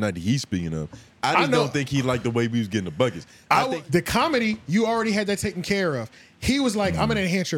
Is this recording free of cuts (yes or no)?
no